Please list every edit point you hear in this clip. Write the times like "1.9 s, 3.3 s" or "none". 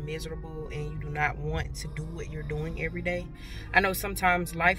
none